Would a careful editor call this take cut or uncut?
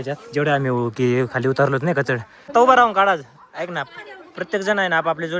cut